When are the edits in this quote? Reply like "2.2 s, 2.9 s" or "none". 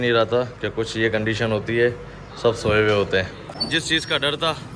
3.5 s